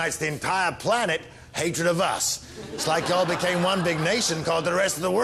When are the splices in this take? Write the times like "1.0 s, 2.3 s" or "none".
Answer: 4.3 s